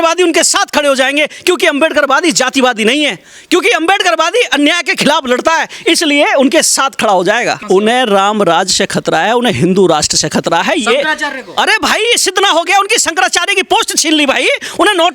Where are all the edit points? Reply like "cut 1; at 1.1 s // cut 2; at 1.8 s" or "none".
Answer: cut 1; at 7.6 s

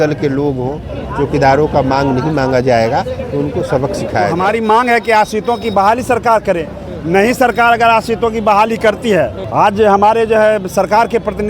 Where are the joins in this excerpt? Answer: cut 1; at 4.3 s // cut 2; at 9.4 s

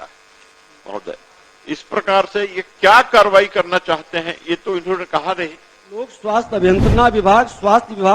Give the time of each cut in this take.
cut 1; at 6.2 s

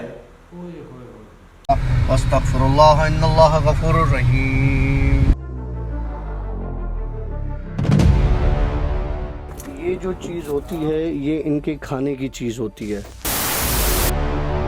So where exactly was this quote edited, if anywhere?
cut 1; at 1.5 s

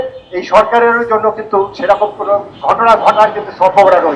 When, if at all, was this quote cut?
cut 1; at 2.5 s

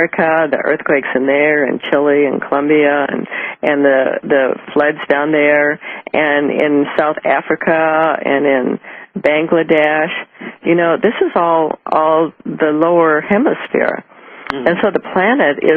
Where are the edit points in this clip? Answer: cut 1; at 8.1 s

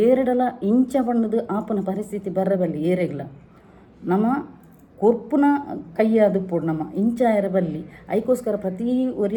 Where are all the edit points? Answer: none

